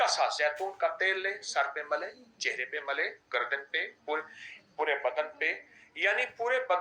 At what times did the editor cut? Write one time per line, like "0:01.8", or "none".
none